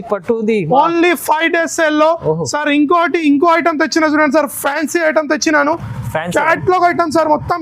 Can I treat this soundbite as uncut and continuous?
yes; 0 cuts

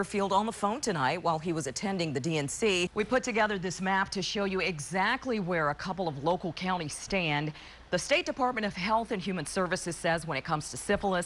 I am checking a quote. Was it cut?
yes; 1 cut; at 2.9 s

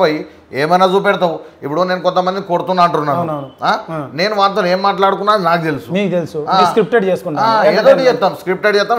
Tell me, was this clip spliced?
no; 0 cuts

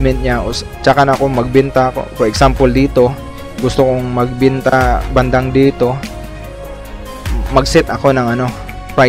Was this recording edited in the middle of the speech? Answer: no; 0 cuts

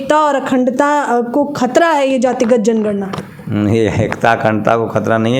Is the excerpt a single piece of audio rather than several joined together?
yes; 0 cuts

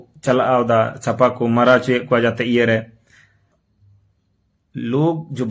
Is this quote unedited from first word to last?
no; 1 cut; at 3.5 s

